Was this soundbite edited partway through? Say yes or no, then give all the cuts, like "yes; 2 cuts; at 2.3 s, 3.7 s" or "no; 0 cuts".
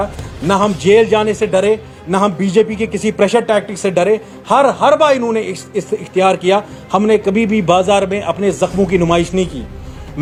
no; 0 cuts